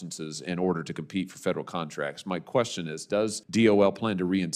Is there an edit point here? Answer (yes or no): yes